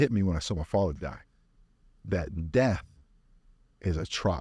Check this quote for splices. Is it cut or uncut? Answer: uncut